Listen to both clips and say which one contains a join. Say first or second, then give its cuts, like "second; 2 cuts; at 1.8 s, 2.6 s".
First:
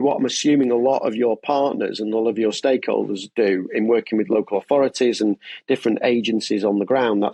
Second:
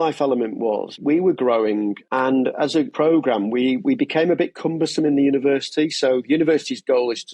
second; 3 cuts; at 1.0 s, 2.0 s, 2.9 s